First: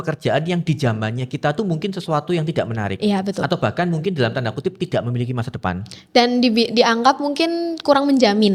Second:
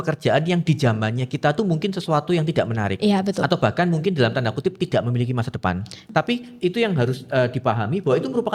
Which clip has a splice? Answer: second; 1 cut; at 6.0 s

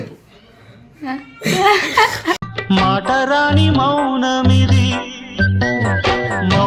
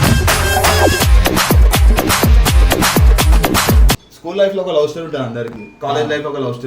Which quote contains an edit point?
second; 1 cut; at 3.9 s

